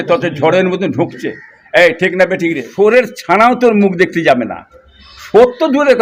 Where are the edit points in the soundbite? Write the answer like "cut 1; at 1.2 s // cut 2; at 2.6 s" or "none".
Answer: cut 1; at 2.7 s

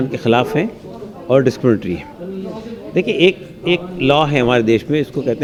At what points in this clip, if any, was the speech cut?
none

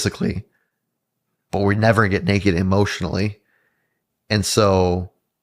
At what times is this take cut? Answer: none

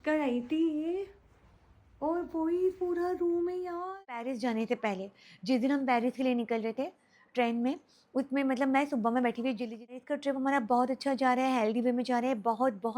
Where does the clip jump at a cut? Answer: cut 1; at 4.3 s // cut 2; at 10.0 s

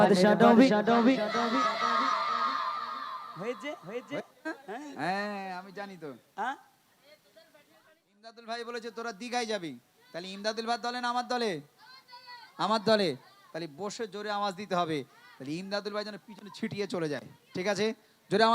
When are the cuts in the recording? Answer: cut 1; at 8.4 s

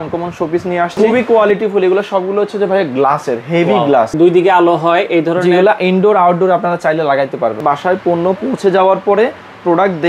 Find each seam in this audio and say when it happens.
cut 1; at 1.0 s // cut 2; at 4.1 s // cut 3; at 7.6 s

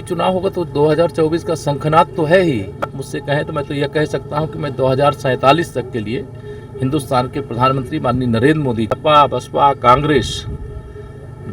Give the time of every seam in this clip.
cut 1; at 3.0 s // cut 2; at 8.9 s

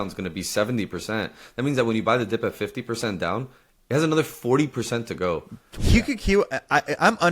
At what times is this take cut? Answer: cut 1; at 5.7 s

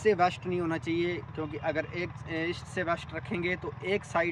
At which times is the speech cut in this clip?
none

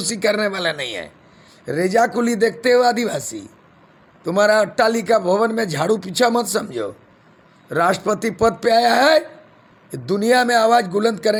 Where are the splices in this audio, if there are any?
none

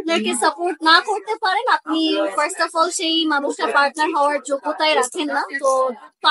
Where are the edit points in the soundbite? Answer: none

